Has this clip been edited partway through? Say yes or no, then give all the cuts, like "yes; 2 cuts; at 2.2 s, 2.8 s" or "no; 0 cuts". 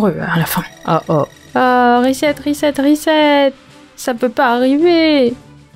no; 0 cuts